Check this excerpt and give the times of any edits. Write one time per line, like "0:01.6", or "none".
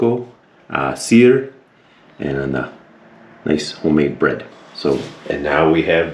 0:05.1